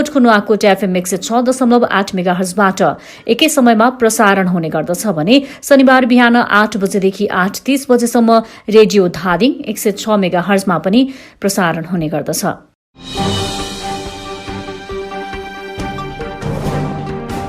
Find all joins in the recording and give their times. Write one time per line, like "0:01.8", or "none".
0:13.0

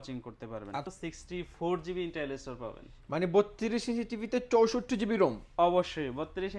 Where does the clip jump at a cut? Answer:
0:00.9

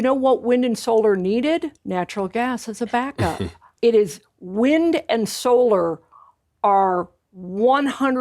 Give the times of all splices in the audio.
0:01.8
0:03.6

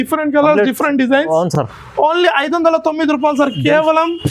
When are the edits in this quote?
none

